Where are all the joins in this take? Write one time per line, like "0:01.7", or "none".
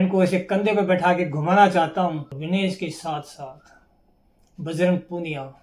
0:02.3